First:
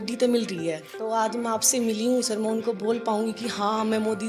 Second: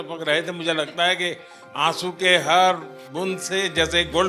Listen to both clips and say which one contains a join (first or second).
first